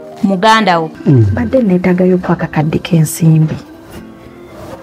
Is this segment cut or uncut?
cut